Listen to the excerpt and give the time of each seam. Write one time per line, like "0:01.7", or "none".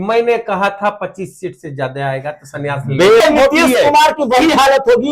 0:03.2